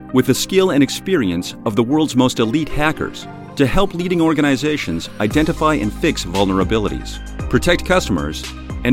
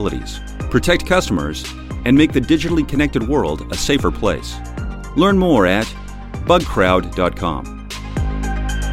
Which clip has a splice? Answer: second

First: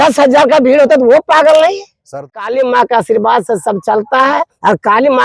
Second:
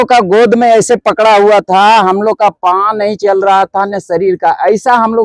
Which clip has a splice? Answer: first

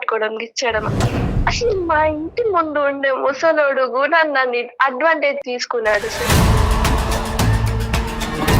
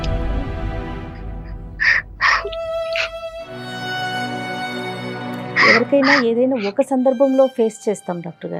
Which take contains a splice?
first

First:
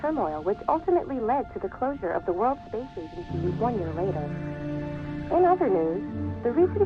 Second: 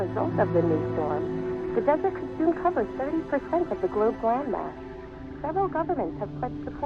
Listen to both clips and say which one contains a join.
first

